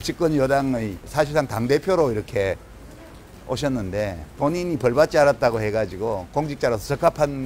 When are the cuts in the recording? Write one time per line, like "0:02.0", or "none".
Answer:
0:01.0
0:04.2